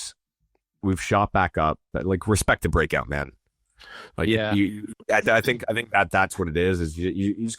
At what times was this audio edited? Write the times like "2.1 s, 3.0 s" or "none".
1.9 s